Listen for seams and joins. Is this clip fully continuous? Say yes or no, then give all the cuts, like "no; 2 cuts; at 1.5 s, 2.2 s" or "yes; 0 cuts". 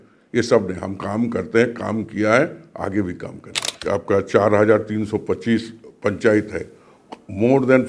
no; 1 cut; at 3.7 s